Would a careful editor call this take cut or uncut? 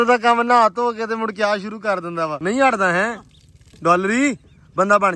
cut